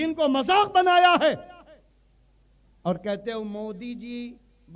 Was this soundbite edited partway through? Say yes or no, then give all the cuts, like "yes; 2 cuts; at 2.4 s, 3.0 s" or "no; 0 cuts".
no; 0 cuts